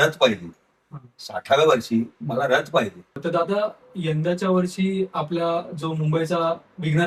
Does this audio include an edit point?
yes; 1 cut; at 3.2 s

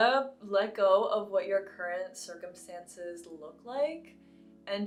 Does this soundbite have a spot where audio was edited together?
no; 0 cuts

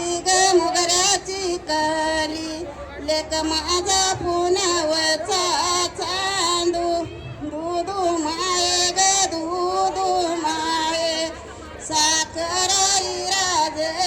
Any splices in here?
no; 0 cuts

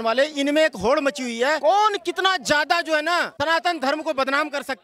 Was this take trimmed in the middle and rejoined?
no; 0 cuts

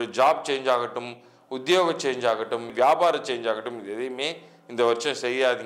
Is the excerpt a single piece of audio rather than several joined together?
no; 1 cut; at 2.7 s

